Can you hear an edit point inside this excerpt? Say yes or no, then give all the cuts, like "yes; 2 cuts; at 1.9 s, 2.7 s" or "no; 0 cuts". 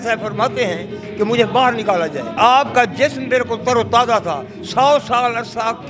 yes; 1 cut; at 2.3 s